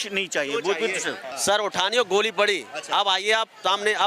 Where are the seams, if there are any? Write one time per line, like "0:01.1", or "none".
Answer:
0:01.3